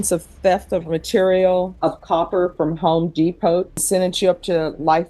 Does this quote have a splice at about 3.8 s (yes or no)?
yes